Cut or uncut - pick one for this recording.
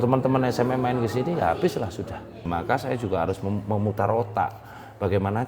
cut